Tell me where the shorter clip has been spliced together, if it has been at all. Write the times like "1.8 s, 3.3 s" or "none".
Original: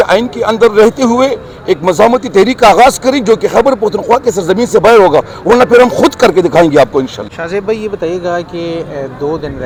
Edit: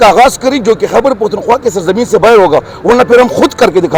none